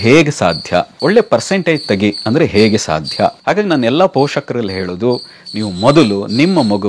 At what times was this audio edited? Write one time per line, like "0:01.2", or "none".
0:00.9
0:03.4